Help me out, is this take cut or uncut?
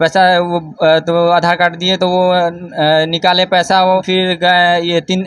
cut